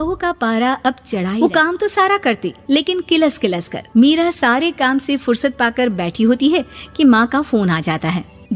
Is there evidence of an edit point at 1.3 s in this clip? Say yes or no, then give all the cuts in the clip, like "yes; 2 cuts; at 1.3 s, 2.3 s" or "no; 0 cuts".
yes; 1 cut; at 1.3 s